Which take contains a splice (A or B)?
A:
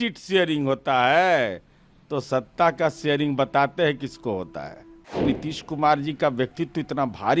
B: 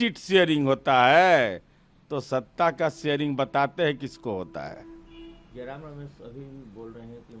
A